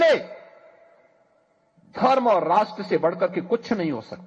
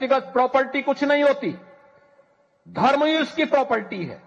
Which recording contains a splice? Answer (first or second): first